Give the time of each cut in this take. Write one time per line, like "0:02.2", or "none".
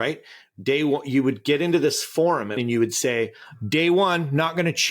0:02.6